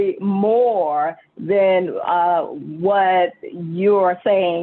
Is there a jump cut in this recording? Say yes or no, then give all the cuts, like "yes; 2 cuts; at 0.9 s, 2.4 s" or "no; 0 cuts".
no; 0 cuts